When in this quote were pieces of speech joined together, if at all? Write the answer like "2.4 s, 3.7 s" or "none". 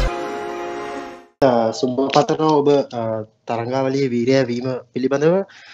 1.2 s